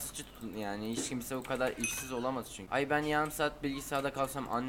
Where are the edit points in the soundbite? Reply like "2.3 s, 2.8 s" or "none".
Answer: 2.6 s